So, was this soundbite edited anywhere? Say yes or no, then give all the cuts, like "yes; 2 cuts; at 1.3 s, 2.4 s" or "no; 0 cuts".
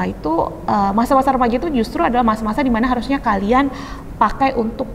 no; 0 cuts